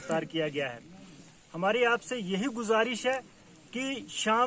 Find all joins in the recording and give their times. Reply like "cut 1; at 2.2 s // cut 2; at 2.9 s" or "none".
cut 1; at 1.2 s